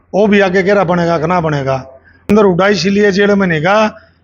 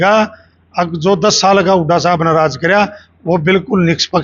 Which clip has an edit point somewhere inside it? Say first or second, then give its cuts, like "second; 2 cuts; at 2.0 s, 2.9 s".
first; 1 cut; at 2.3 s